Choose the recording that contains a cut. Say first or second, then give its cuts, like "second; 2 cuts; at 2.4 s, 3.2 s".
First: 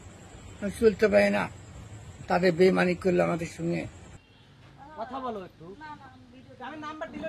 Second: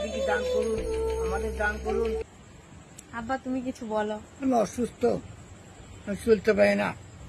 first; 1 cut; at 4.1 s